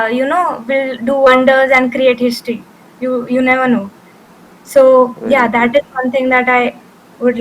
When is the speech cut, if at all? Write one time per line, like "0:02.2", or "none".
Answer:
none